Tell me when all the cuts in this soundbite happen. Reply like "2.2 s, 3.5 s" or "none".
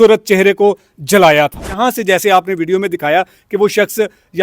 1.8 s